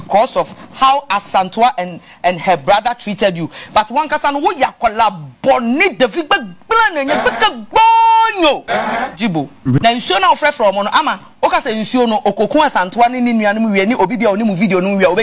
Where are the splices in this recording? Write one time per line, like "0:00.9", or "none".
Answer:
0:09.8